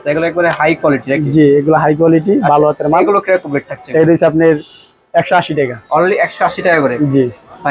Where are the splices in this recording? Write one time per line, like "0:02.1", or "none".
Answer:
none